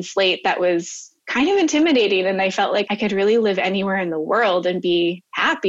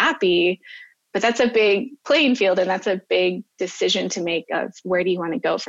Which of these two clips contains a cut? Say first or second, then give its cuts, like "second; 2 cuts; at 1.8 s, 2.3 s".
first; 1 cut; at 2.9 s